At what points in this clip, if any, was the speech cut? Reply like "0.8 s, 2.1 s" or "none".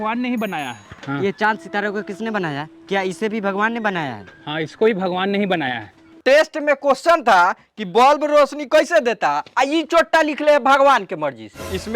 6.1 s